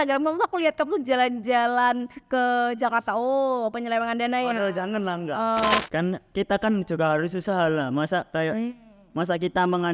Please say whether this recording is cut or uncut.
cut